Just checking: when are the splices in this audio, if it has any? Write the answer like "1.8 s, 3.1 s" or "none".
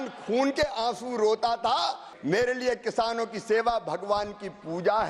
2.1 s